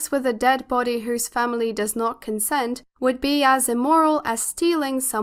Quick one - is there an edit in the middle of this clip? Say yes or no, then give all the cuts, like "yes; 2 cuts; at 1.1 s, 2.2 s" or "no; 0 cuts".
no; 0 cuts